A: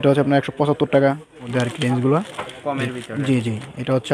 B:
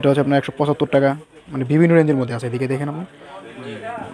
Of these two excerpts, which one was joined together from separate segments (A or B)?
A